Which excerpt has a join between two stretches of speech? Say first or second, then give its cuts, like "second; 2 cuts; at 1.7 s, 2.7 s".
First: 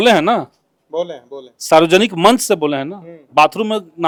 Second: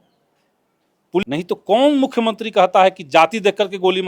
second; 1 cut; at 1.2 s